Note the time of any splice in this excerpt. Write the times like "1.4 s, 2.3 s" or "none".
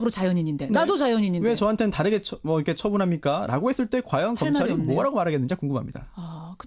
5.7 s